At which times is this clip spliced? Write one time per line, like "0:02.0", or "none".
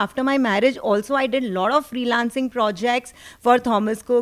none